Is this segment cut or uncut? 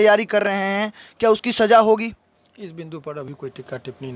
uncut